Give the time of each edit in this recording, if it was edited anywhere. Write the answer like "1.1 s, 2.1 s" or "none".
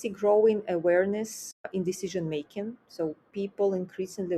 none